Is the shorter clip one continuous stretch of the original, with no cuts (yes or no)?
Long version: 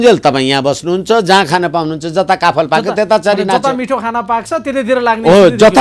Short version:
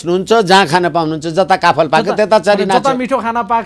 yes